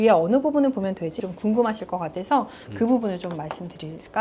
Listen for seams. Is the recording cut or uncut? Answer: cut